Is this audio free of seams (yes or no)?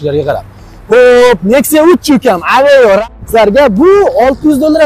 no